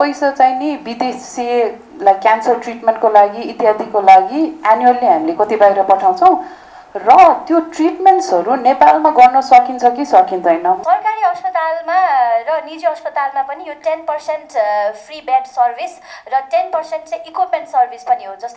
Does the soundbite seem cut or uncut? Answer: cut